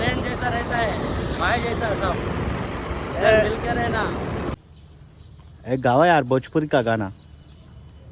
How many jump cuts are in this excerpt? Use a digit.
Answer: 1